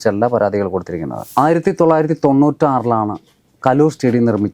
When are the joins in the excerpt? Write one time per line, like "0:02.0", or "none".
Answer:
0:01.2

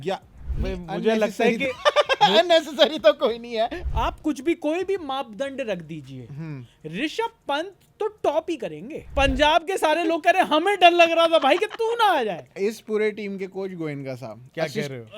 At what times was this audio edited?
0:03.7
0:09.4
0:12.6

